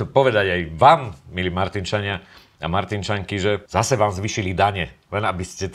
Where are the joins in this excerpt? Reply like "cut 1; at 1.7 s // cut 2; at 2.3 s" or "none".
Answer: cut 1; at 3.6 s